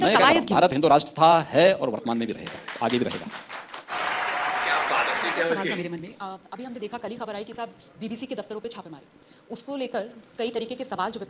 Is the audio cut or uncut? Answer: uncut